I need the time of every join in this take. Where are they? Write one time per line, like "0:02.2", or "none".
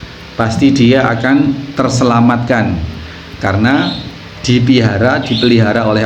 none